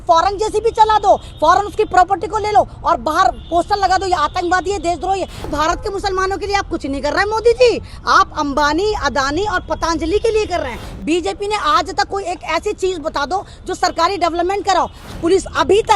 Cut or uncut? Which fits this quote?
cut